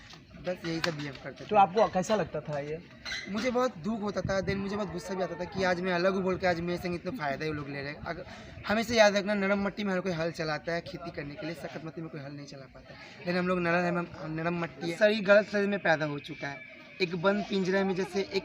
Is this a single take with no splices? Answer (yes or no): no